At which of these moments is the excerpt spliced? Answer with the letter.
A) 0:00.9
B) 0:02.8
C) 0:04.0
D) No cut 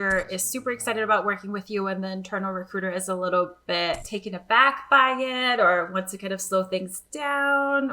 C